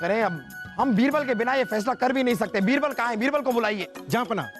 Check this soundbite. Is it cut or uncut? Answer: uncut